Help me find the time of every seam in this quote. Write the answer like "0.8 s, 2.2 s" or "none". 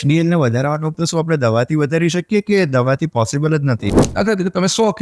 0.9 s, 4.0 s

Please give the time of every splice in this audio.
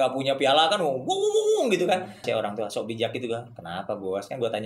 2.2 s

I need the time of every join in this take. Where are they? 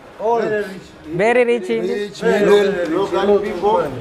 none

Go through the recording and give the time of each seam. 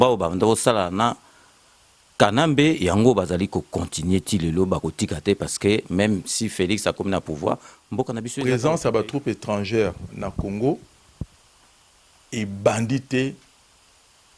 8.3 s

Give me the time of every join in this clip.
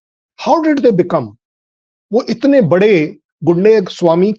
none

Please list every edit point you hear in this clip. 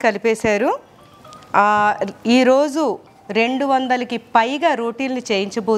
none

